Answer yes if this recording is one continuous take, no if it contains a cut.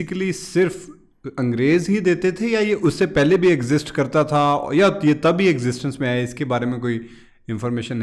yes